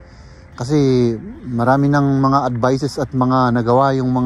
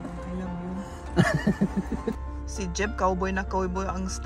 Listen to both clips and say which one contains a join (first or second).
second